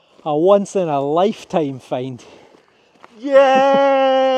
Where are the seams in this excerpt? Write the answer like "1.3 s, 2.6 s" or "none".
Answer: none